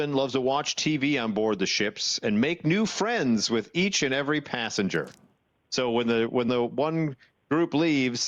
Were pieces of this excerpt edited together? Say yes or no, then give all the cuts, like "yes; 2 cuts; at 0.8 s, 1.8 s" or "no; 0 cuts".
yes; 1 cut; at 6.5 s